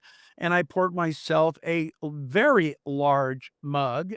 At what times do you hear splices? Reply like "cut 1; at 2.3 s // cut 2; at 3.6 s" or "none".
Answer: none